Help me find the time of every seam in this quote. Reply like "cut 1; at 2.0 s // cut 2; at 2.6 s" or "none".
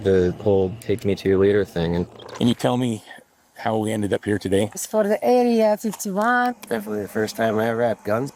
cut 1; at 2.1 s // cut 2; at 4.8 s // cut 3; at 6.5 s